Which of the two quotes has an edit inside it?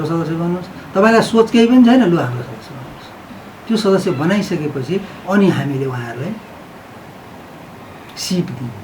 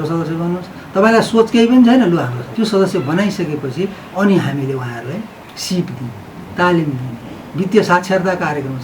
second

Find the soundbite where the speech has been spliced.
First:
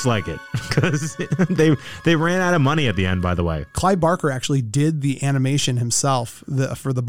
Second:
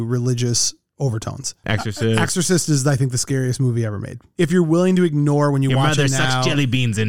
second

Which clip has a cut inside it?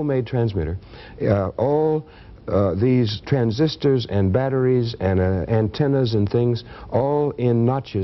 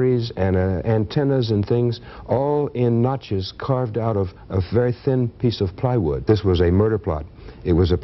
second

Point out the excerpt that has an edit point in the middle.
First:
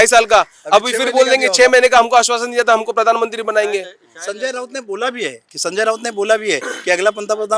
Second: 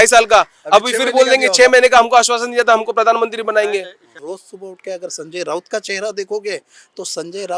second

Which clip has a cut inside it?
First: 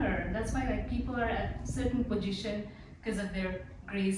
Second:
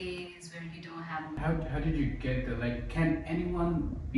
second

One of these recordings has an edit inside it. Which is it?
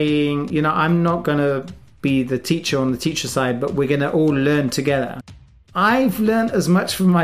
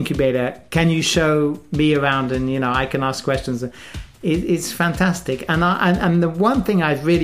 first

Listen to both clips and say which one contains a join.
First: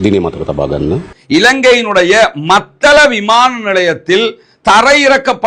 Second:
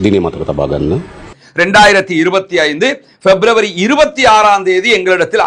first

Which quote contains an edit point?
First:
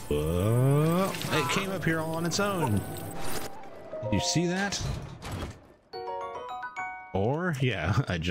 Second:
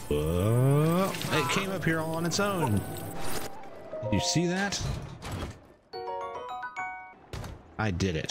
second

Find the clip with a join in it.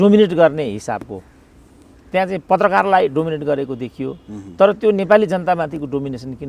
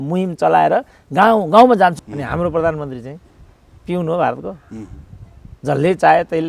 second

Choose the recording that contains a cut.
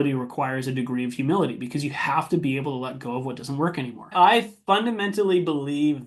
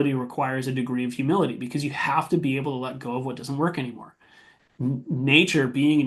first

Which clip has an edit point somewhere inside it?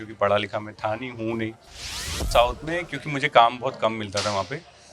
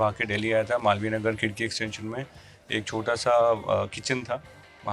first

